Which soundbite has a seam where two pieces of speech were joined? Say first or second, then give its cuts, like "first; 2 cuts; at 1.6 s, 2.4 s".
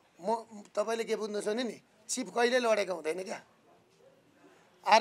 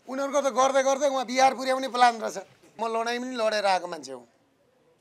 second; 1 cut; at 2.7 s